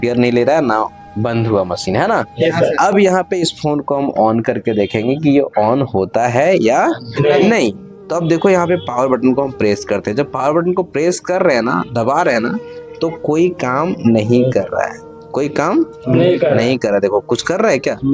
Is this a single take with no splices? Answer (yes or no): yes